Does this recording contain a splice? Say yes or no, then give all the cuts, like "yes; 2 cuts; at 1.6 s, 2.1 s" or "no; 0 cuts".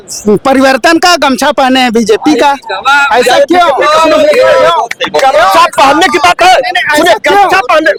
no; 0 cuts